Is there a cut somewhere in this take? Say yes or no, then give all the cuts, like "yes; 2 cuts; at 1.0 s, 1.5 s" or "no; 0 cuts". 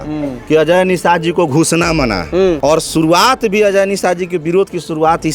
yes; 1 cut; at 2.6 s